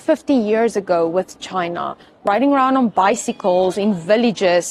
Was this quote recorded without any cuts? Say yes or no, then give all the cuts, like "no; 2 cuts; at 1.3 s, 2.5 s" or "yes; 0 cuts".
no; 1 cut; at 2.2 s